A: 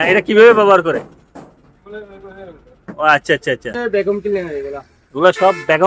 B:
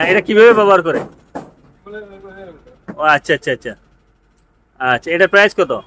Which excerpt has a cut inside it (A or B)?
A